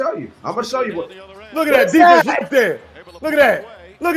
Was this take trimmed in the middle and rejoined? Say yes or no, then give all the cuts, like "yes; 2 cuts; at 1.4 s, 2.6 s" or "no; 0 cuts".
no; 0 cuts